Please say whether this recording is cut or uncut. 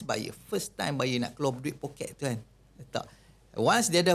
uncut